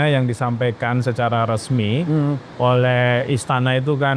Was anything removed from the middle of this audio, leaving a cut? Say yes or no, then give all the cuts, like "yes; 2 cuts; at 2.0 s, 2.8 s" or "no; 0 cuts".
yes; 1 cut; at 2.5 s